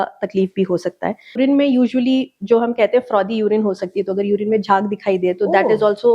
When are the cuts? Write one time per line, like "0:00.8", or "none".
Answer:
0:01.4